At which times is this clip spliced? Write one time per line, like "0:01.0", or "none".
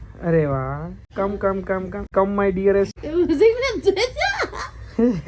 0:01.0
0:02.0
0:03.0